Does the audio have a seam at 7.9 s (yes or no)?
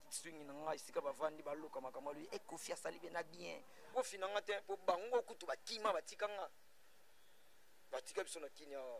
no